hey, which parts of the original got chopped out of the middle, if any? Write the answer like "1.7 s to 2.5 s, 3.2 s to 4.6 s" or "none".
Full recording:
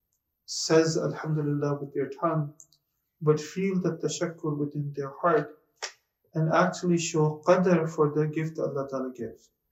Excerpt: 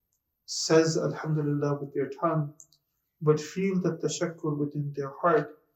none